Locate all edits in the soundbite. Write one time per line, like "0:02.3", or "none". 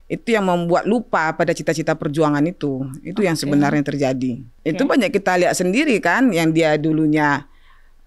0:04.5